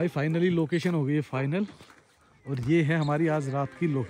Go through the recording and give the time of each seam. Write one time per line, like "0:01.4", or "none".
none